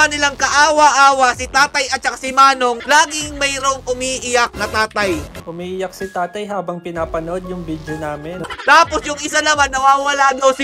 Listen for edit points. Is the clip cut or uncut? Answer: cut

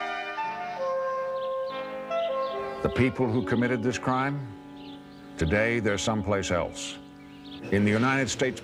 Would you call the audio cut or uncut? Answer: cut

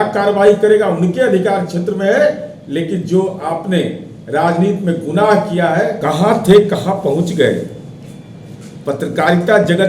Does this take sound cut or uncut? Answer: cut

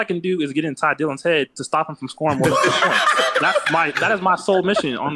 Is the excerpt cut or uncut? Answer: uncut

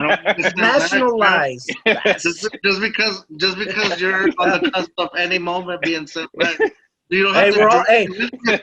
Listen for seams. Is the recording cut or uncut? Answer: uncut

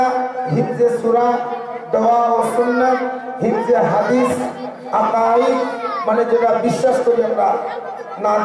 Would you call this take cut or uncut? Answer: uncut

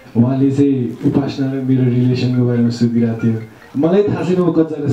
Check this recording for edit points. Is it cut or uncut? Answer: uncut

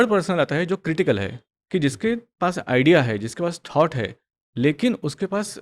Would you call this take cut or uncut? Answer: uncut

